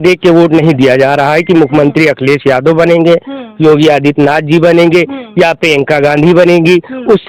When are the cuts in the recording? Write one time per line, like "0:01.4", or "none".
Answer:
none